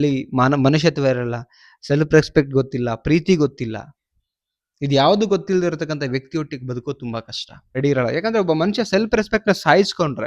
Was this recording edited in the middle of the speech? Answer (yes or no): yes